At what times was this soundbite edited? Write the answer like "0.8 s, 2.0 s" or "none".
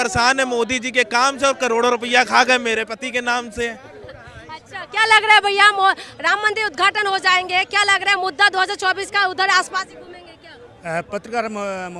none